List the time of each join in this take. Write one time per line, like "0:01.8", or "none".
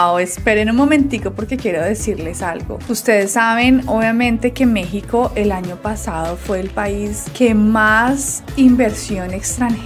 none